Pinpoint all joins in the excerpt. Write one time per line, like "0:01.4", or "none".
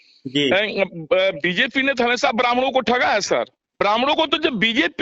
0:03.7